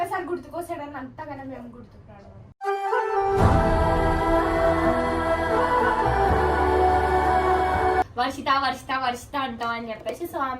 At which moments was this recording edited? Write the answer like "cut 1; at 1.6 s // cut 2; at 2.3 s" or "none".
cut 1; at 8.1 s